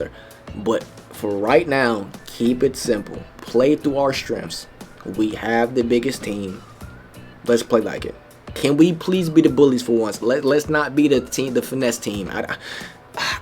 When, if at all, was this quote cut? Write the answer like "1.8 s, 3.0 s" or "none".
8.5 s